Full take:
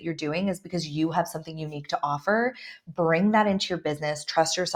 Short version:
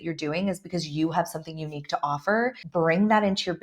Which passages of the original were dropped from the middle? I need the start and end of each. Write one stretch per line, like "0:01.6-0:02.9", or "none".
0:02.6-0:02.8